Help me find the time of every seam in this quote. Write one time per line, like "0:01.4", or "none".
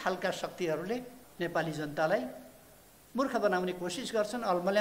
0:01.2